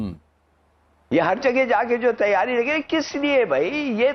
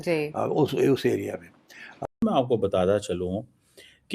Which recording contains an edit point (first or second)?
second